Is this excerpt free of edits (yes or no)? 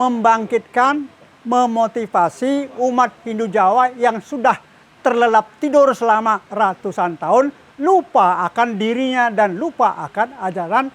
yes